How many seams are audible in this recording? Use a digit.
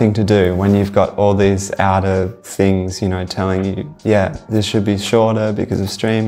0